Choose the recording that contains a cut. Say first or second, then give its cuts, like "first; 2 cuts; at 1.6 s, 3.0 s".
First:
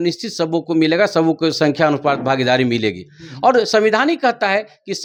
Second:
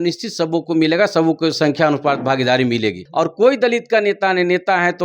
second; 1 cut; at 3.0 s